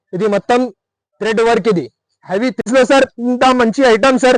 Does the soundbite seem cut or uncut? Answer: cut